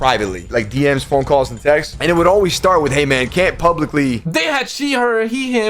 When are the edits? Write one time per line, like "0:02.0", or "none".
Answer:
0:04.2